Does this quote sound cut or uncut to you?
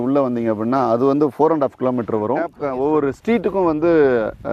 cut